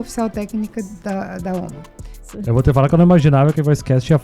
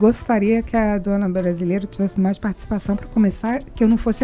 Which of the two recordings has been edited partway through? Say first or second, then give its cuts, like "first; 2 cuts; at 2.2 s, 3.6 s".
first; 1 cut; at 2.4 s